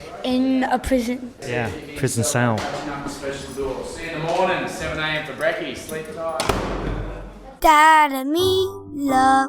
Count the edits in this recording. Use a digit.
2